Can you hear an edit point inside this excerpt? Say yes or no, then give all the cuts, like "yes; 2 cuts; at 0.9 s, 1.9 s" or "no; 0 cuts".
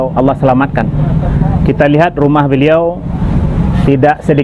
no; 0 cuts